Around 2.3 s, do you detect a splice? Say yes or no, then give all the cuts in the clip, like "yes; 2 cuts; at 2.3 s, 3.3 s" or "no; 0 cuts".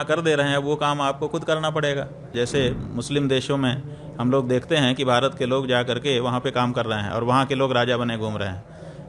yes; 1 cut; at 2.3 s